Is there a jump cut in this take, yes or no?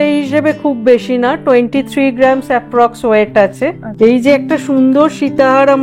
yes